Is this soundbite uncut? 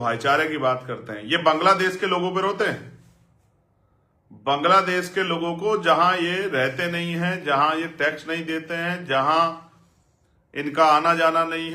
yes; 0 cuts

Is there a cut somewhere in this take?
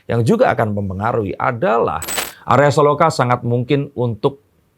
yes; 1 cut; at 2.0 s

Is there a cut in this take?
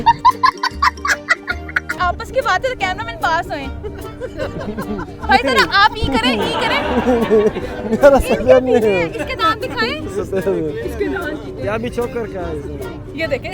yes; 1 cut; at 1.9 s

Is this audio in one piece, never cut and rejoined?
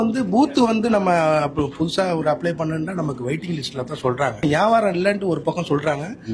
no; 1 cut; at 4.4 s

